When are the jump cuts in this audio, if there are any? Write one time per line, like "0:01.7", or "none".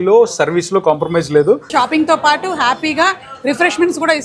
0:01.7